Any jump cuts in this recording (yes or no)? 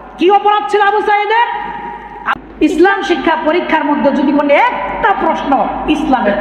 yes